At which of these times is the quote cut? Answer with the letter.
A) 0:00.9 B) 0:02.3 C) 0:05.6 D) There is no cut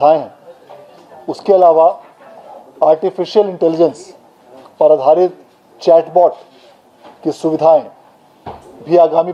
D